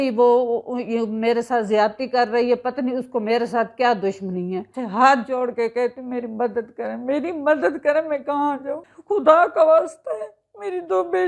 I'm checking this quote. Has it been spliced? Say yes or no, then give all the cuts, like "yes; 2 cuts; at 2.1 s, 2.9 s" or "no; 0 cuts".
yes; 2 cuts; at 4.8 s, 8.9 s